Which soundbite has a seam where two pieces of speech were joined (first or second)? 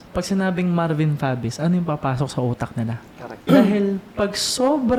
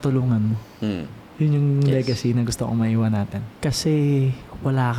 second